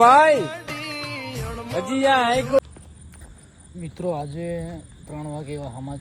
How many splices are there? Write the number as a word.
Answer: one